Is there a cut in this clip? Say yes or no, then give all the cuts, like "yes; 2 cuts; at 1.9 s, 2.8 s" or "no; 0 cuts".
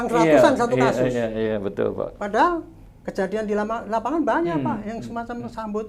no; 0 cuts